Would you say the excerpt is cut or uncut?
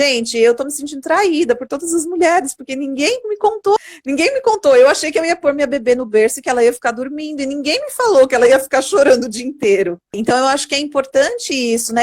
cut